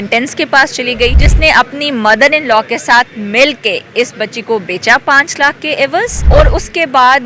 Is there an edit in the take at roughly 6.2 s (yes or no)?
yes